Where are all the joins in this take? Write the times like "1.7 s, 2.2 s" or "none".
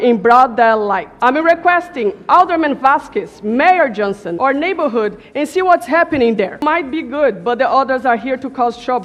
none